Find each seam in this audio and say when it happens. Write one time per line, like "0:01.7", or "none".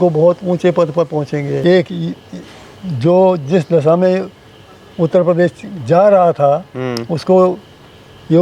0:01.6